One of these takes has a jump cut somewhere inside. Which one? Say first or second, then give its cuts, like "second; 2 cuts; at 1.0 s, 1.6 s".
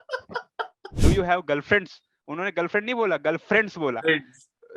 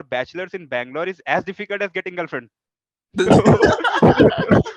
first; 1 cut; at 0.9 s